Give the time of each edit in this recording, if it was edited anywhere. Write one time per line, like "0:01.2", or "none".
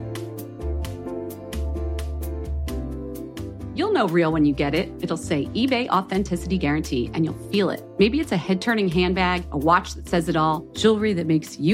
0:02.2